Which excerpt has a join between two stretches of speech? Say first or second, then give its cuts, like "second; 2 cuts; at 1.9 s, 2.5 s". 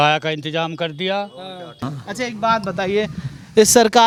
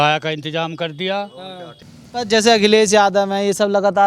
second; 1 cut; at 1.6 s